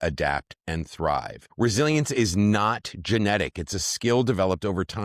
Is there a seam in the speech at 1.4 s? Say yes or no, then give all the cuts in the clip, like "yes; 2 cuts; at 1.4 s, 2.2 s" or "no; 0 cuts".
yes; 1 cut; at 1.4 s